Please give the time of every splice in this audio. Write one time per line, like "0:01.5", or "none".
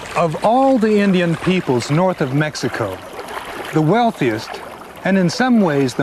none